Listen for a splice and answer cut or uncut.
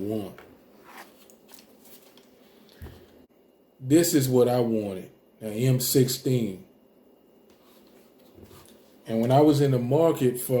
cut